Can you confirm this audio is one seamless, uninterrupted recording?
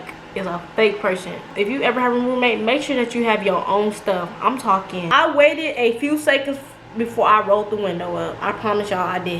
no; 2 cuts; at 1.5 s, 5.0 s

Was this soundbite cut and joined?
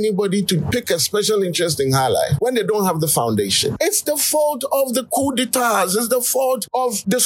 no; 0 cuts

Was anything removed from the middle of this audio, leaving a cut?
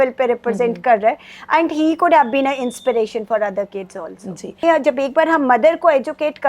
yes; 1 cut; at 4.6 s

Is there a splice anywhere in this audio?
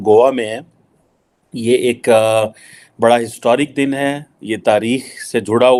no; 0 cuts

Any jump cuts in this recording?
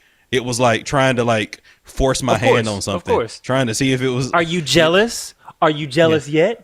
no; 0 cuts

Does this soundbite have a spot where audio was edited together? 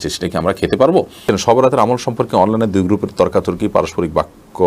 yes; 1 cut; at 1.2 s

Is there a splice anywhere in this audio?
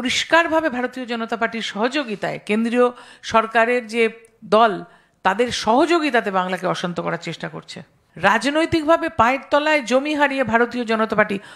yes; 1 cut; at 8.0 s

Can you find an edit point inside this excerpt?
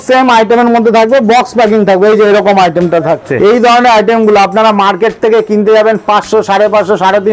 yes; 1 cut; at 3.3 s

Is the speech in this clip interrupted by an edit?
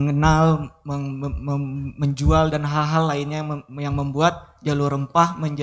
no; 0 cuts

